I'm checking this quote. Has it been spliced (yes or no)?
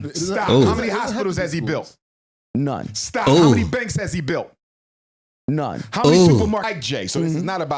yes